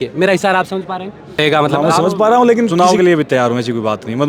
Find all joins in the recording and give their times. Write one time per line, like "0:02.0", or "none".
0:02.7